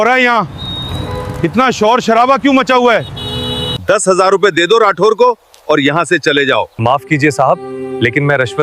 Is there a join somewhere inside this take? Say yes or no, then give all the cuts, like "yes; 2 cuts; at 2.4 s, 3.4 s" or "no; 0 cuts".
yes; 2 cuts; at 3.7 s, 6.7 s